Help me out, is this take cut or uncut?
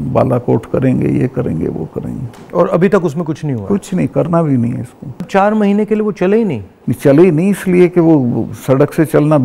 cut